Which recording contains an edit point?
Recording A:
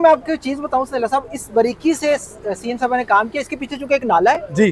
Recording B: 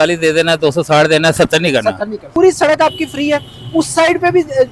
B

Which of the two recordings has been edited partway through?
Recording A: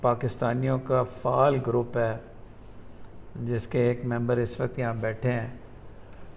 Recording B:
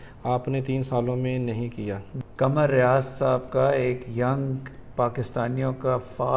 B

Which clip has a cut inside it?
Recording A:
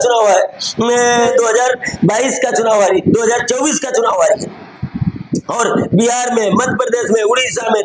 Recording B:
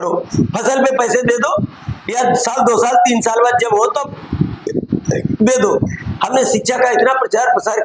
A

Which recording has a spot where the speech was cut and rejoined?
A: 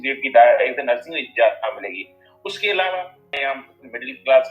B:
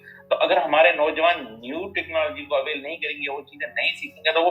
A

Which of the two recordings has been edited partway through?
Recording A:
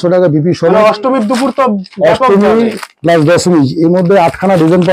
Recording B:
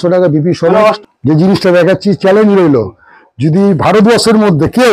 B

